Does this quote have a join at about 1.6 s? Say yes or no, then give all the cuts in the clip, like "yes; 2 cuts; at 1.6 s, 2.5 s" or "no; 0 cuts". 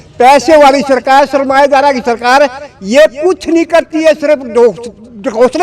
no; 0 cuts